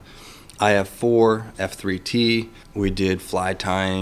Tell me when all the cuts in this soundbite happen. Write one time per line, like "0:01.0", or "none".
0:01.5
0:02.6